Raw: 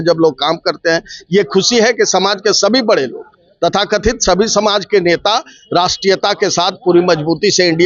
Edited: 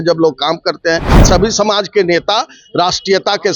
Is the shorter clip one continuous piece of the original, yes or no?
no